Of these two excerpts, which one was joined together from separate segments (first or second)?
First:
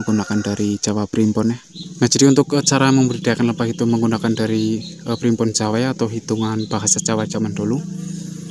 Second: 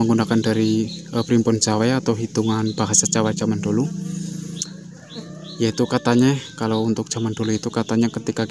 first